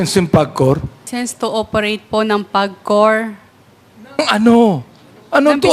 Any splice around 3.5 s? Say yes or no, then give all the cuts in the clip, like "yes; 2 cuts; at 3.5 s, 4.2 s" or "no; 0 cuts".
no; 1 cut; at 1.1 s